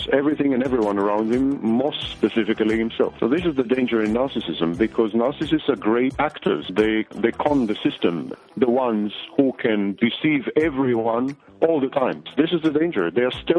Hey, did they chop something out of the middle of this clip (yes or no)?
yes